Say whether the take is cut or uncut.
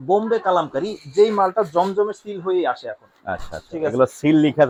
uncut